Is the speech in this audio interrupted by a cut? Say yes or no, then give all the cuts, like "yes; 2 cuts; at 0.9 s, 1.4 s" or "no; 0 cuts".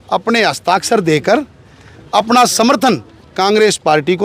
no; 0 cuts